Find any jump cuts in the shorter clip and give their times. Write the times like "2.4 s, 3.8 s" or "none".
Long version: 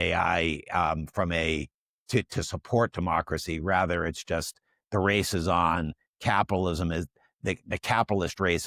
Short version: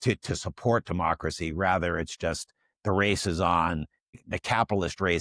4.1 s